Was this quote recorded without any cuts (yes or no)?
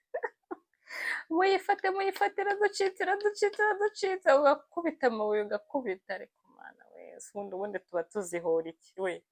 yes